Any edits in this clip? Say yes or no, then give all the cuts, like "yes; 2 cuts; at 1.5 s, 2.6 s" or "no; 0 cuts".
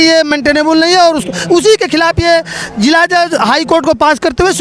no; 0 cuts